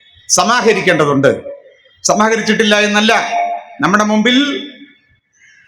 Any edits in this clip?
no; 0 cuts

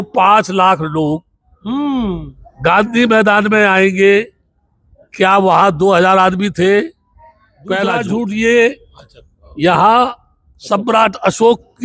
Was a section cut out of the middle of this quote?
yes; 1 cut; at 7.8 s

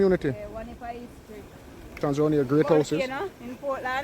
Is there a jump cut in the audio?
yes; 1 cut; at 2.0 s

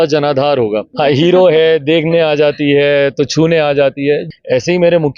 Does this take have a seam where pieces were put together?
yes; 2 cuts; at 0.9 s, 4.3 s

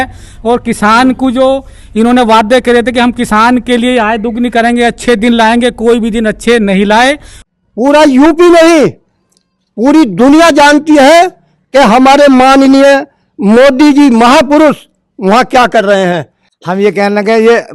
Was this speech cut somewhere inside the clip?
yes; 2 cuts; at 7.3 s, 16.2 s

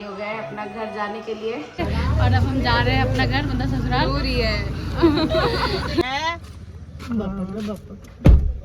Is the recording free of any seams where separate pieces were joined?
no; 2 cuts; at 1.8 s, 6.0 s

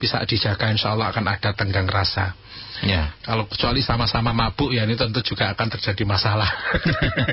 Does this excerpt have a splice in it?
no; 0 cuts

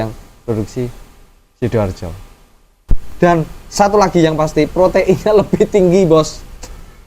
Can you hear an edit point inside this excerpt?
yes; 1 cut; at 3.0 s

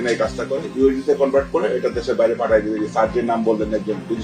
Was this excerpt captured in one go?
yes; 0 cuts

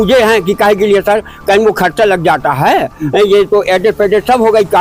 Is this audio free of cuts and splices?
yes; 0 cuts

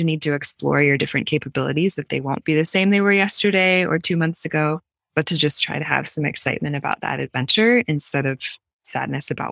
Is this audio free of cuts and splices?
yes; 0 cuts

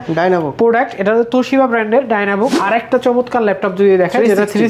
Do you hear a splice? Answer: yes; 1 cut; at 2.6 s

